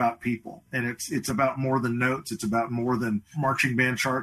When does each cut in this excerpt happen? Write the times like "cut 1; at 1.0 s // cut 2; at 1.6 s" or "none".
cut 1; at 3.3 s